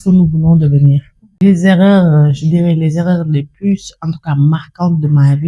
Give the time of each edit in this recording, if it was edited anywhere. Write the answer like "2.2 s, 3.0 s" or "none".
1.4 s